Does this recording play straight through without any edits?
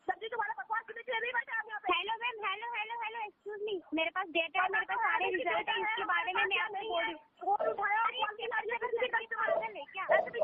yes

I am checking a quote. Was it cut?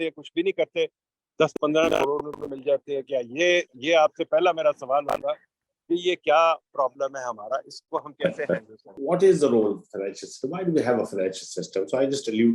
yes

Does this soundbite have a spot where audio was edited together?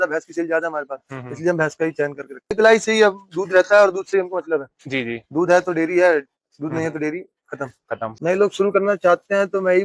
yes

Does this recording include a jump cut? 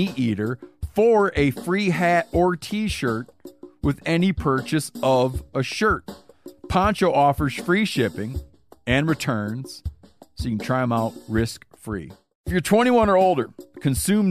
yes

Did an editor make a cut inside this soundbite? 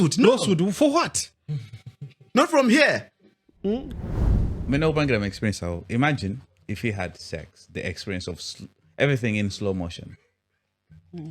yes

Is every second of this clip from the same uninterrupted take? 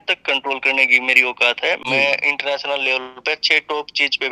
no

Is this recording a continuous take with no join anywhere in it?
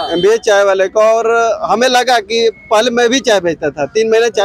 yes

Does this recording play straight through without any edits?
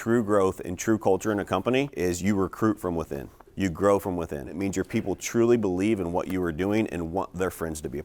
no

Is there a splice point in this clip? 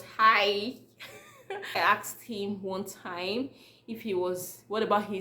yes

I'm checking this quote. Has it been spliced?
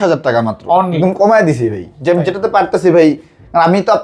yes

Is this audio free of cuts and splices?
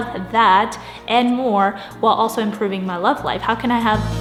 yes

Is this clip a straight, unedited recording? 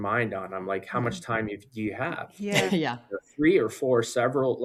yes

